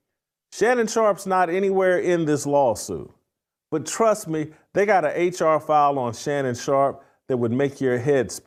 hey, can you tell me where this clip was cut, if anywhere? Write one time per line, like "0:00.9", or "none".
none